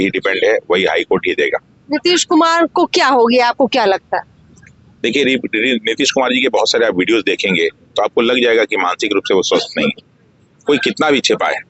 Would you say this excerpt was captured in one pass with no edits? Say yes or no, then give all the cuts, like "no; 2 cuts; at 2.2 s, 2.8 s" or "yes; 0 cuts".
yes; 0 cuts